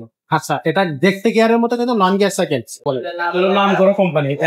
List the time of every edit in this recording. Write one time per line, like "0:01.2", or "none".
0:02.8